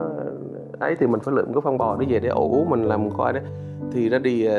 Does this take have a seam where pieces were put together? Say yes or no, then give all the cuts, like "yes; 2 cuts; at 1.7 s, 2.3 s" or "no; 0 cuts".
no; 0 cuts